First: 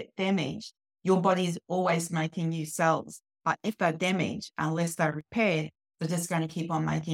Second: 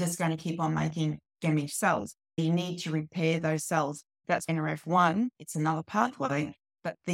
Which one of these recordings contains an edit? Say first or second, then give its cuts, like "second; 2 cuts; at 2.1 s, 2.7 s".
second; 2 cuts; at 2.4 s, 4.3 s